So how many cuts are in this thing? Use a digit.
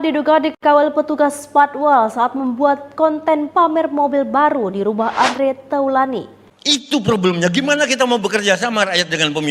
1